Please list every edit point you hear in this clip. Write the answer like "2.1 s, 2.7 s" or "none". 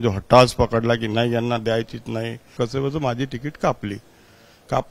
2.5 s